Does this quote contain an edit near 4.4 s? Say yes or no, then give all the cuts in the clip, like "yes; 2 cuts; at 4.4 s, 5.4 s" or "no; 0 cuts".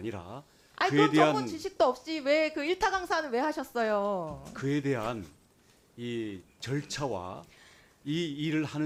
no; 0 cuts